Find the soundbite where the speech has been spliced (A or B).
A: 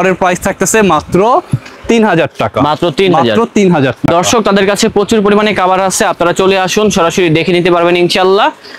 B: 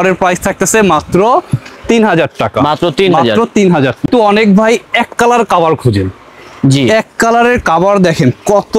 B